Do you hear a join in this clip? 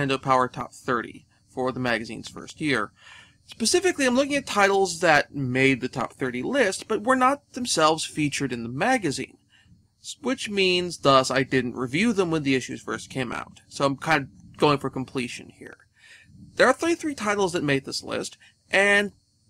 no; 0 cuts

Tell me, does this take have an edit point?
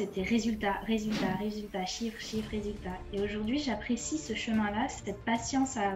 no; 0 cuts

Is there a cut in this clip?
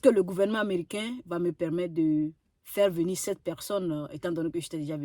no; 0 cuts

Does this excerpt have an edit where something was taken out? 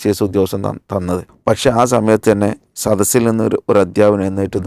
yes; 1 cut; at 1.3 s

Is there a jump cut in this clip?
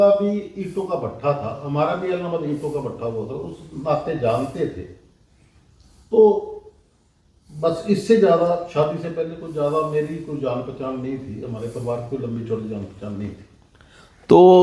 no; 0 cuts

